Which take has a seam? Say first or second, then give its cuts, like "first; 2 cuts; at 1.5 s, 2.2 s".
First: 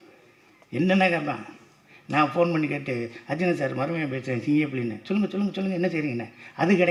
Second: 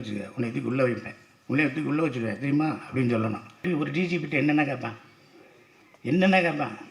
second; 1 cut; at 3.6 s